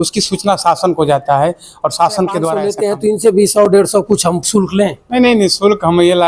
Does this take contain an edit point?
yes; 1 cut; at 2.7 s

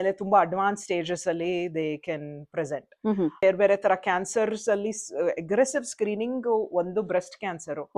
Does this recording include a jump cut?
yes; 1 cut; at 3.4 s

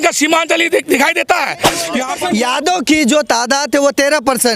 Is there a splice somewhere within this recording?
yes; 1 cut; at 2.0 s

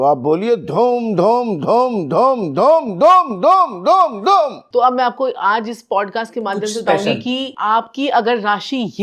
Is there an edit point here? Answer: yes; 2 cuts; at 4.6 s, 7.6 s

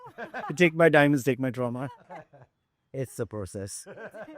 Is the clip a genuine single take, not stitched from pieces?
no; 1 cut; at 1.9 s

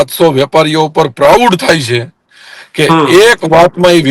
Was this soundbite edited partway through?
no; 0 cuts

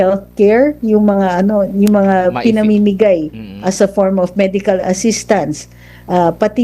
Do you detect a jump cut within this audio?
no; 0 cuts

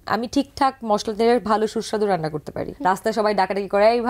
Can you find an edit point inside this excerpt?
yes; 1 cut; at 2.6 s

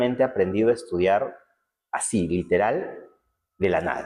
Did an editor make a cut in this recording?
no; 0 cuts

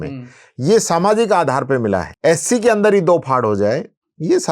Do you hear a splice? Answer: yes; 1 cut; at 2.1 s

